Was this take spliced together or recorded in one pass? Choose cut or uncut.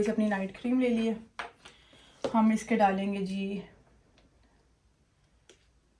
uncut